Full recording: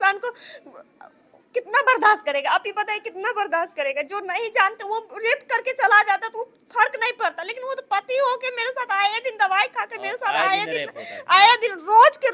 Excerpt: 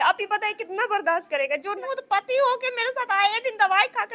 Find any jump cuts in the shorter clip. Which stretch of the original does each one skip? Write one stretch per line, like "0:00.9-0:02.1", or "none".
0:04.2-0:07.6

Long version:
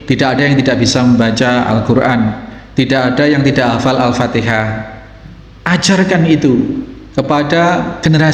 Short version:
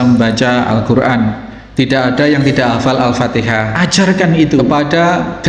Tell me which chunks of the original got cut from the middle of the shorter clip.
0:04.7-0:05.6
0:06.6-0:07.3

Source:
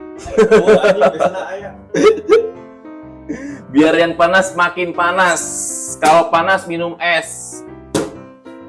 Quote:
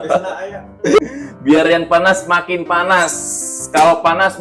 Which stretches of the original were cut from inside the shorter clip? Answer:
0:02.1-0:03.3

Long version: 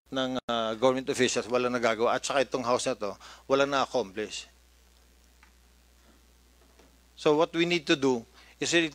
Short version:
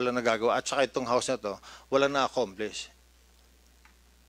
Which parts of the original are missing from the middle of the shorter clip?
none

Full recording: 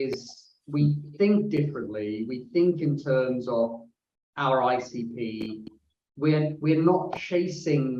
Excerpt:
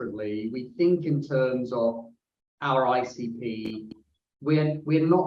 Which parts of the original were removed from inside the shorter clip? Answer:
none

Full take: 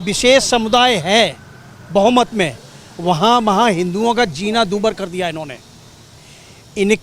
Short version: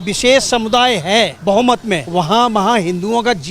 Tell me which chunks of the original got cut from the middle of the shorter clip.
0:01.4-0:01.8
0:02.5-0:03.0

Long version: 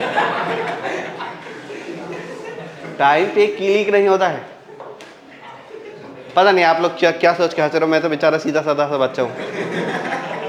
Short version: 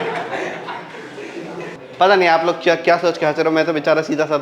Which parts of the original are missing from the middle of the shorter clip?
0:02.3-0:06.1

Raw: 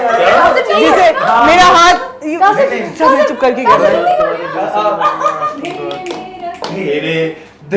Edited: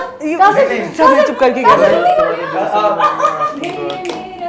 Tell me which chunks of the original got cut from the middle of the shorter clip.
none

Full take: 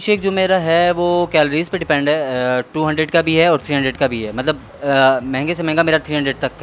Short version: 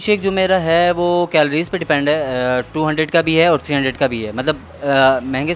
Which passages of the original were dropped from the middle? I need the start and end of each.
none

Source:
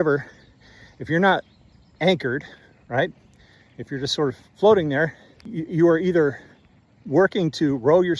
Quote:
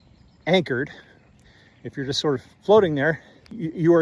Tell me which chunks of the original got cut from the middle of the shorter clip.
0:02.8-0:03.2

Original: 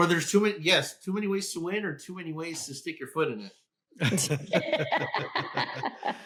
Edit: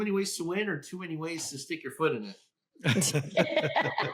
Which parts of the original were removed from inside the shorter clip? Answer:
none

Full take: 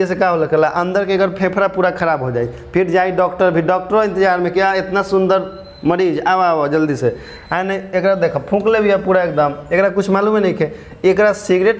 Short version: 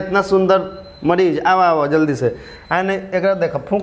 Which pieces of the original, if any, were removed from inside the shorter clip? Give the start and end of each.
none

